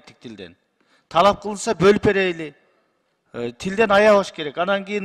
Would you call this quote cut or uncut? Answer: uncut